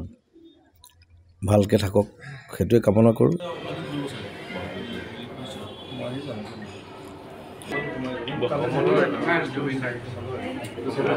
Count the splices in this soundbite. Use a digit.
1